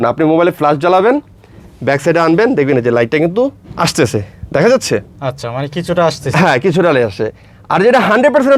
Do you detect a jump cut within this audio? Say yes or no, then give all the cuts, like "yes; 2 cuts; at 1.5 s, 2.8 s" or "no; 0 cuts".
no; 0 cuts